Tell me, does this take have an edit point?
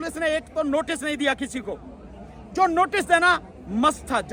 no; 0 cuts

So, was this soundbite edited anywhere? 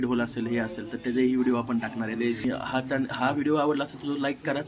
yes; 1 cut; at 2.4 s

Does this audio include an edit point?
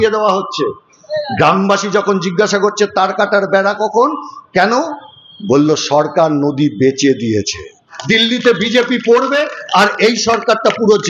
yes; 1 cut; at 7.9 s

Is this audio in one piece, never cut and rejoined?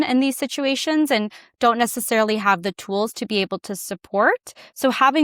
yes; 0 cuts

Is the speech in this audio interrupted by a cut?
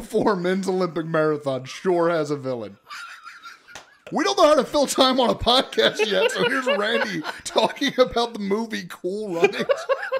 yes; 1 cut; at 4.0 s

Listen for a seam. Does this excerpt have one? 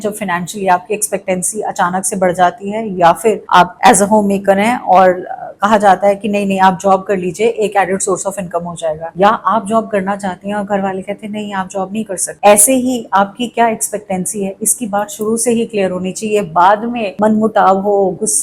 no; 0 cuts

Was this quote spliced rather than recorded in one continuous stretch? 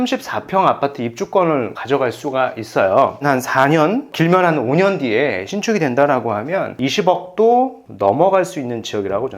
yes; 3 cuts; at 1.8 s, 3.2 s, 6.7 s

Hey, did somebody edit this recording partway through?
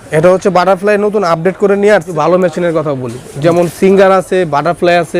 yes; 1 cut; at 1.9 s

